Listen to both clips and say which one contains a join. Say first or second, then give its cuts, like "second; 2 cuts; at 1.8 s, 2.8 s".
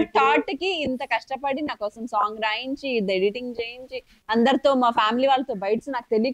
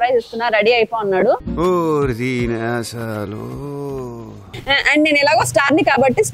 second; 1 cut; at 4.4 s